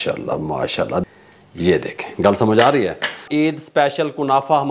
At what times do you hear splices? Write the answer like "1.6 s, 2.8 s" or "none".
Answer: 1.0 s, 3.2 s